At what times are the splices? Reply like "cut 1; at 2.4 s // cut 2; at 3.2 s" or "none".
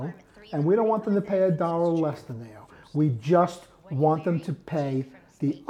none

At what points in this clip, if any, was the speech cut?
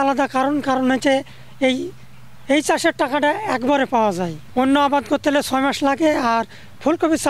cut 1; at 4.3 s

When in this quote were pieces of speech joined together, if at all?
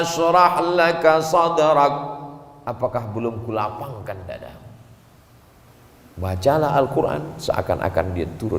cut 1; at 5.7 s

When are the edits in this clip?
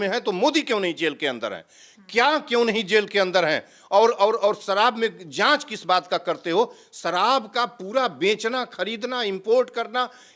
none

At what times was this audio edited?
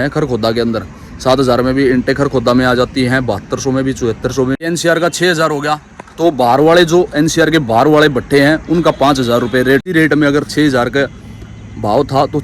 cut 1; at 4.5 s // cut 2; at 9.9 s

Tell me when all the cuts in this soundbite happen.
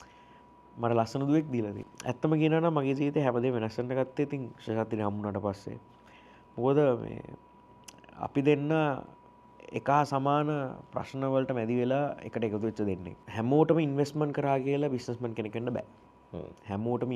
cut 1; at 1.7 s // cut 2; at 13.2 s

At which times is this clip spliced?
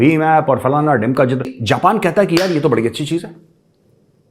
cut 1; at 1.6 s

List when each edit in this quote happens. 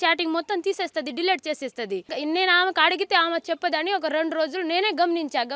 cut 1; at 2.1 s

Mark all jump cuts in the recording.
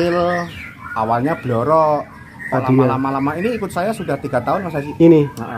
none

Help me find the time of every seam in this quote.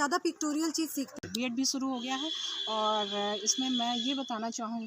cut 1; at 1.2 s

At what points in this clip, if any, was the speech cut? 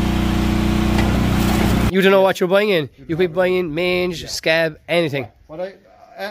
cut 1; at 1.9 s

